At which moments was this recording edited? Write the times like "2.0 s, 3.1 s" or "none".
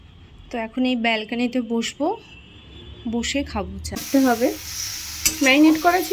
4.0 s